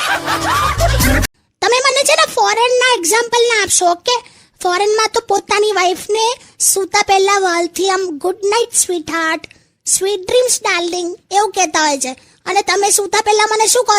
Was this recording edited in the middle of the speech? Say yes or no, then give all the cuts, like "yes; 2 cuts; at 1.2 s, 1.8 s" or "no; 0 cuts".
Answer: yes; 1 cut; at 1.3 s